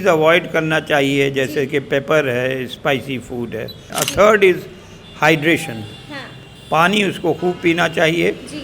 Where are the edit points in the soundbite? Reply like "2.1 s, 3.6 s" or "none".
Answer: 3.9 s